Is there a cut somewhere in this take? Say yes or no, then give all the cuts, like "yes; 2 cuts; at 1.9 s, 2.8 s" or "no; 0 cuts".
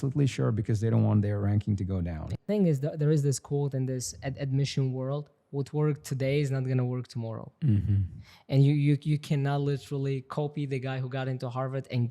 yes; 1 cut; at 2.4 s